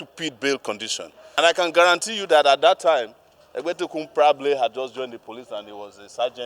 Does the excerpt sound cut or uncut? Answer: cut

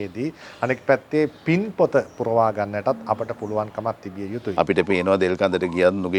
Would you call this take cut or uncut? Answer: cut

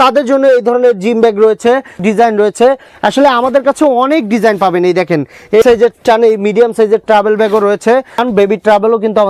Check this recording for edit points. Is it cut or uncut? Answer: cut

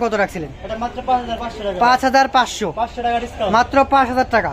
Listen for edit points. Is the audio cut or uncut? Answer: uncut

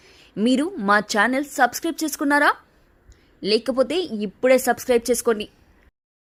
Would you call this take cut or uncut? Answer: uncut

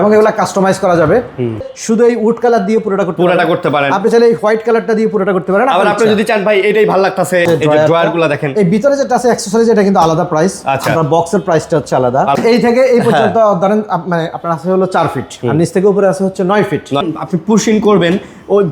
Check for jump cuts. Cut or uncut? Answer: cut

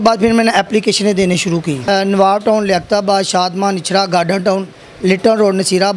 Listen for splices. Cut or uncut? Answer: cut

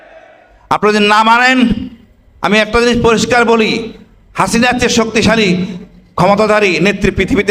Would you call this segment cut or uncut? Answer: uncut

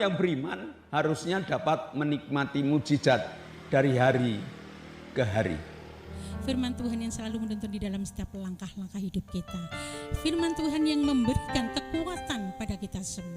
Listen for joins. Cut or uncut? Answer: cut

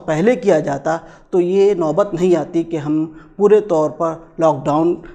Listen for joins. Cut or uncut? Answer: uncut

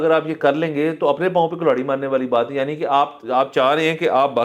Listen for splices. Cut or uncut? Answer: uncut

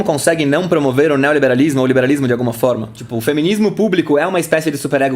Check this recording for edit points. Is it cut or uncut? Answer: cut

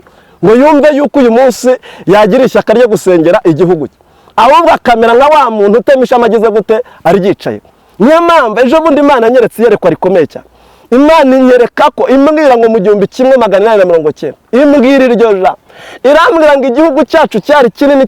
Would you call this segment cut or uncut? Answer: uncut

